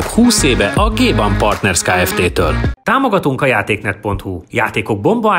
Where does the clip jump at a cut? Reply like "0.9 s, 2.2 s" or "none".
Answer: 2.7 s